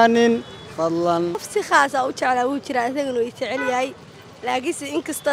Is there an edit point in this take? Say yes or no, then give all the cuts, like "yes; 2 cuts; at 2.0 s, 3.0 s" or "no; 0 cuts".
yes; 1 cut; at 1.4 s